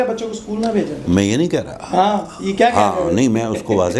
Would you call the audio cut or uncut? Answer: uncut